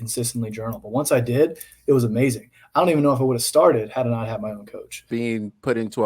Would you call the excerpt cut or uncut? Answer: cut